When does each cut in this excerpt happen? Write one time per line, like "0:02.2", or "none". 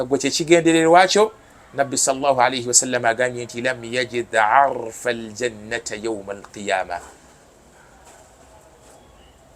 none